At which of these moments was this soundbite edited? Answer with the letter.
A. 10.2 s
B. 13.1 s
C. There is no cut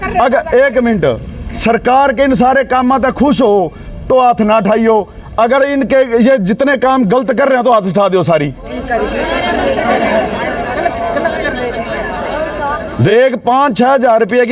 B